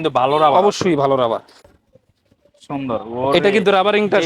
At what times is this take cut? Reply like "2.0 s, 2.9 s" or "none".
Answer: 1.6 s

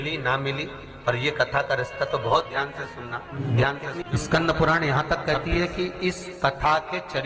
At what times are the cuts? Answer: 3.3 s, 4.0 s

